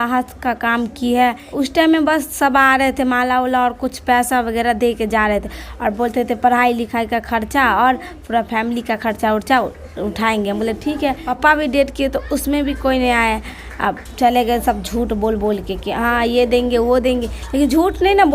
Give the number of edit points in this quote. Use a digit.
2